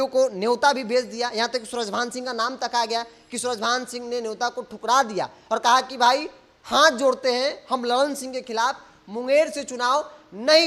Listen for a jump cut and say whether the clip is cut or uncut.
uncut